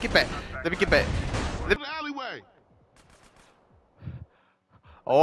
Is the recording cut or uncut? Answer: cut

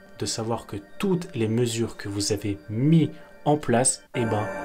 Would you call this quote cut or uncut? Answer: uncut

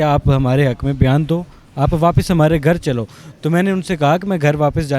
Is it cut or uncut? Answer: uncut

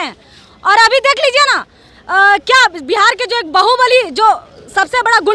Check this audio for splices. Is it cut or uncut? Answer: uncut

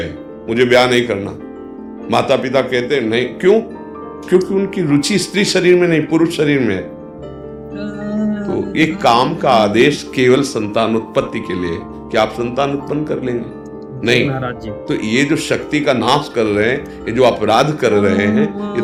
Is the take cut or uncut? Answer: uncut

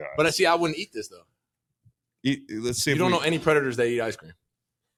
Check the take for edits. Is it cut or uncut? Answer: uncut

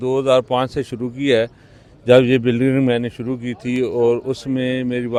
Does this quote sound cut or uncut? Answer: uncut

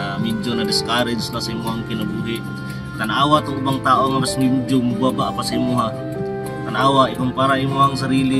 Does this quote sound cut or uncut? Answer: uncut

